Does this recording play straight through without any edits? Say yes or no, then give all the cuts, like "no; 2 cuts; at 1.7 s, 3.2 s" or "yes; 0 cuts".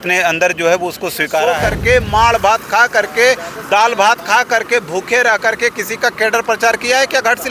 no; 1 cut; at 1.7 s